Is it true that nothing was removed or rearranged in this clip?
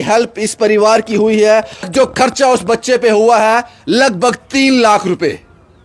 no; 1 cut; at 1.9 s

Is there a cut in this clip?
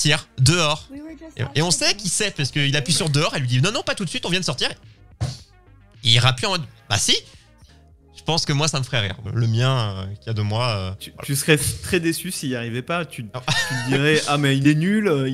yes; 3 cuts; at 7.6 s, 9.2 s, 11.1 s

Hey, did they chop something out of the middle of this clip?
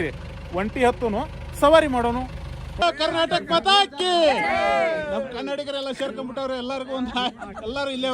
yes; 1 cut; at 2.8 s

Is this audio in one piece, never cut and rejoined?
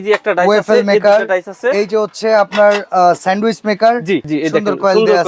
no; 1 cut; at 4.3 s

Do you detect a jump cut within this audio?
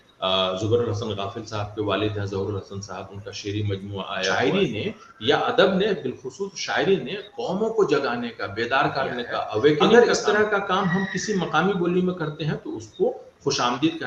yes; 2 cuts; at 4.3 s, 9.9 s

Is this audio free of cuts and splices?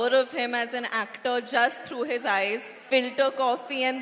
no; 1 cut; at 2.7 s

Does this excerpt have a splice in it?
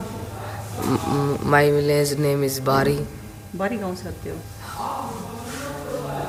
no; 0 cuts

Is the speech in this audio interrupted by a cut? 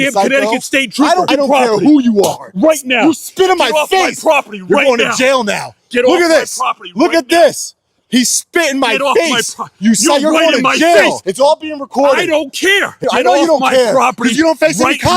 yes; 3 cuts; at 1.3 s, 11.2 s, 13.0 s

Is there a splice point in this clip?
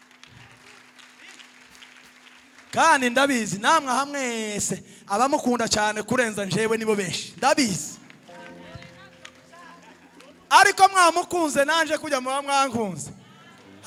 no; 0 cuts

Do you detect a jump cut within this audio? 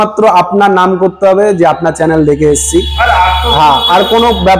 no; 0 cuts

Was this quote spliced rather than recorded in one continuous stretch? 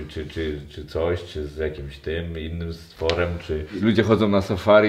yes; 1 cut; at 3.8 s

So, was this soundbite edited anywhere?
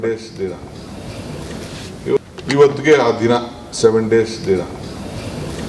yes; 1 cut; at 2.2 s

